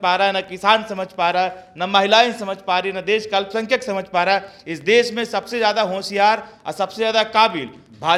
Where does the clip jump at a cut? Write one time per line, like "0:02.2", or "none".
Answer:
none